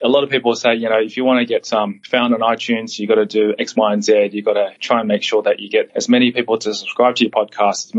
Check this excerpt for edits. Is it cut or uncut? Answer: cut